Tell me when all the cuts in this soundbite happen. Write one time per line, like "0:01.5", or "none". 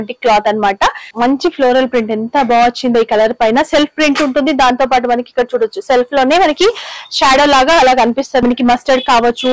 0:01.0
0:08.4